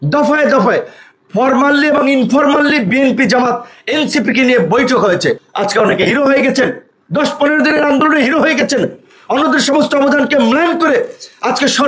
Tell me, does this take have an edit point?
yes; 1 cut; at 5.5 s

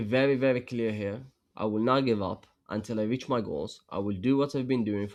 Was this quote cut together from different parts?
no; 0 cuts

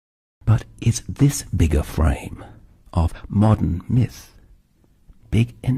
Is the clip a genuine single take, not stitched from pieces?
no; 1 cut; at 2.7 s

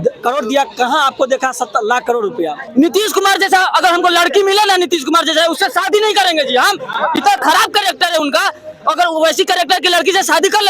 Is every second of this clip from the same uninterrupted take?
no; 1 cut; at 2.6 s

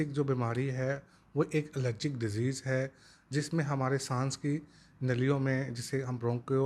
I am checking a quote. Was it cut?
no; 0 cuts

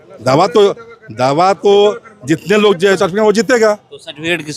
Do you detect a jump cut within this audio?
yes; 1 cut; at 3.0 s

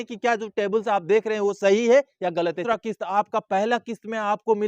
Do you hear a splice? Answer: yes; 1 cut; at 2.6 s

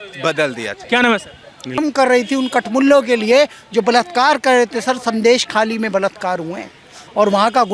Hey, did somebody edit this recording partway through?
yes; 1 cut; at 1.8 s

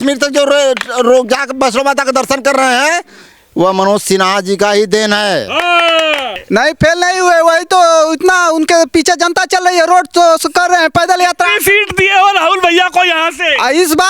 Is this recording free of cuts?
no; 1 cut; at 6.3 s

